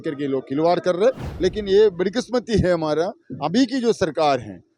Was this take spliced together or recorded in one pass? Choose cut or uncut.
cut